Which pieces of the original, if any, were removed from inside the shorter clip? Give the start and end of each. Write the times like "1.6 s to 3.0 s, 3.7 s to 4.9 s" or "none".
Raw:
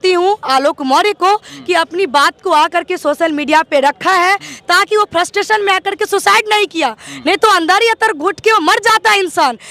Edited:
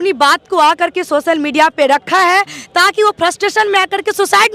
none